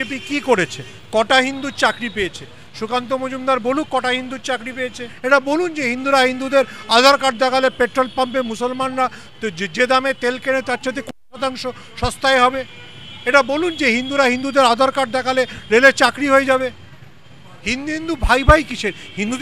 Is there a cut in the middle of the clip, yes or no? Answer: yes